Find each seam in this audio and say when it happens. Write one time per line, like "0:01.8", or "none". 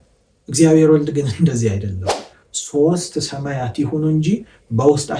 0:02.3